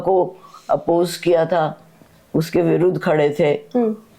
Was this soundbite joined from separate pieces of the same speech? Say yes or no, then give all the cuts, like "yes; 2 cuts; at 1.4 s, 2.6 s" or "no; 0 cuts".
no; 0 cuts